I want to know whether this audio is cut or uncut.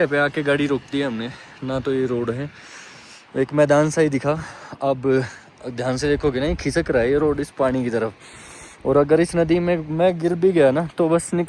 uncut